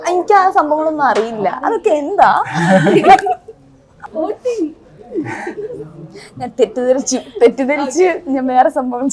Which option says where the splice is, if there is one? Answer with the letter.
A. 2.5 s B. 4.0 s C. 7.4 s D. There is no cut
B